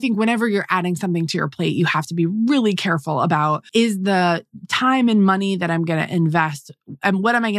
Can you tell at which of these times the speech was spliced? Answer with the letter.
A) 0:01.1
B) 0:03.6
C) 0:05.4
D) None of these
B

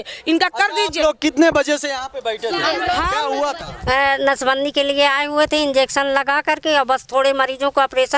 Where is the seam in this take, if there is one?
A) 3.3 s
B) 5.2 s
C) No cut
A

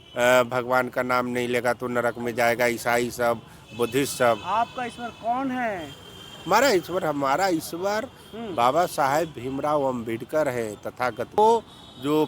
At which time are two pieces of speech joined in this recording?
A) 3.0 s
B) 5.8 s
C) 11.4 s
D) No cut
C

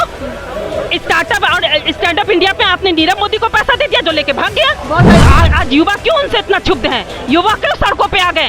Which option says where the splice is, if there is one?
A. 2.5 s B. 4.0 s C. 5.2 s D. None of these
C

